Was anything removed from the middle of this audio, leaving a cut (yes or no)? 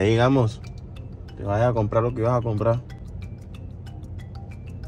yes